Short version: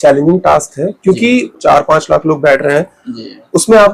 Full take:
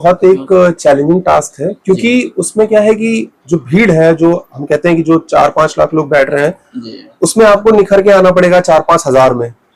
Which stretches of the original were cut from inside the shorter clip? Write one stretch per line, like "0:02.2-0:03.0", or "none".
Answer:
0:02.4-0:05.2